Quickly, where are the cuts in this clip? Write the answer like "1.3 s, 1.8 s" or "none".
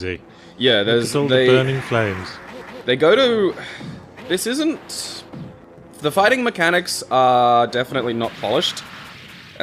2.0 s